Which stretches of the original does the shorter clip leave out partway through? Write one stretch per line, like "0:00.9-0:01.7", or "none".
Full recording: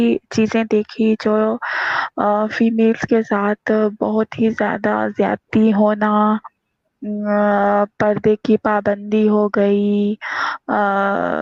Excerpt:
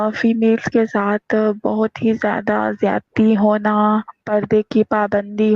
0:06.6-0:08.0